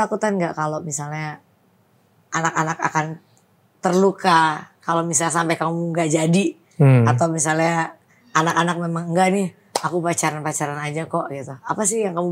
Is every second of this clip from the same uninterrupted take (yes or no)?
yes